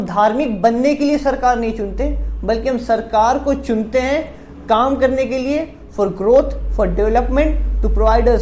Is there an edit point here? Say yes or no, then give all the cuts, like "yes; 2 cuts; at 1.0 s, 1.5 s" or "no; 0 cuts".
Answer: no; 0 cuts